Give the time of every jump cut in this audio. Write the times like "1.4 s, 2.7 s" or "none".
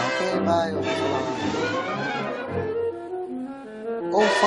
1.6 s